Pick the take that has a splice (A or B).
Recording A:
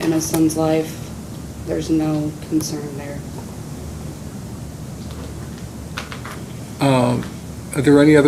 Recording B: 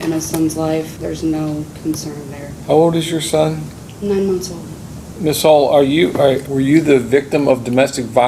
B